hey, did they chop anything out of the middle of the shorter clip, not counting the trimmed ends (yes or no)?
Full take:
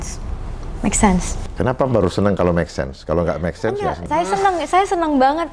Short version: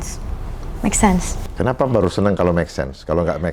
no